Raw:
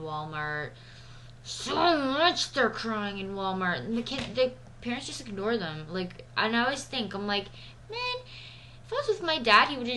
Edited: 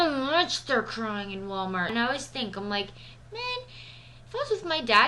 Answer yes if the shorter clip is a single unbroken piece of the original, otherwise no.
no